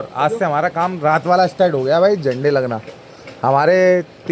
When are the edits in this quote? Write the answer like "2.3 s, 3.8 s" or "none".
none